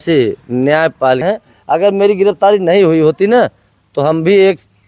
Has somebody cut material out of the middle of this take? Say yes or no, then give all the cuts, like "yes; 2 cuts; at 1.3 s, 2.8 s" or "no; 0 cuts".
yes; 1 cut; at 1.2 s